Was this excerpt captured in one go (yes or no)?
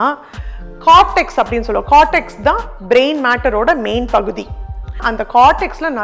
no